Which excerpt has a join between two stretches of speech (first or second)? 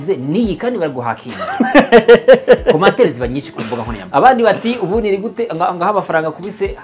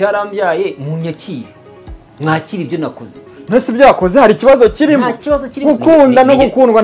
first